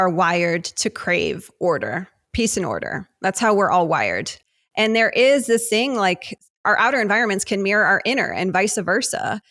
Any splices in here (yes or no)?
yes